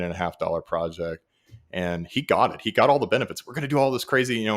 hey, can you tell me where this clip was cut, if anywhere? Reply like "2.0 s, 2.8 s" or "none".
none

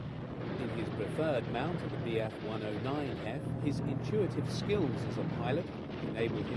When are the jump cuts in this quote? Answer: 4.1 s

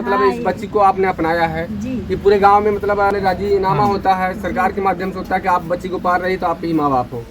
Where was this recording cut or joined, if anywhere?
3.0 s

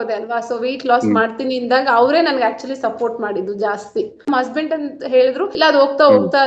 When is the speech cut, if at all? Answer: 4.3 s, 5.5 s

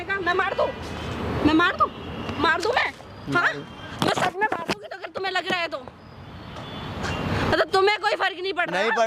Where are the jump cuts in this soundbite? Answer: none

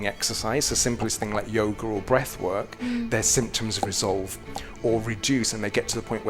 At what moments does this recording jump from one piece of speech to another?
none

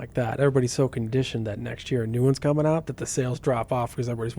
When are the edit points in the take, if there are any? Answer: none

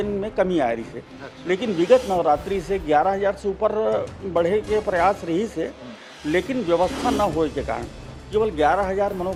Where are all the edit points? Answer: none

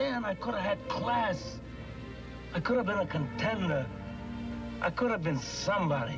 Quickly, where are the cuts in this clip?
none

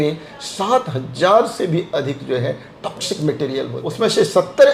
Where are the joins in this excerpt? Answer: 3.8 s

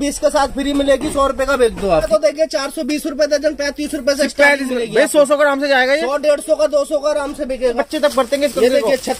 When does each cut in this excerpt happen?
2.1 s, 7.8 s

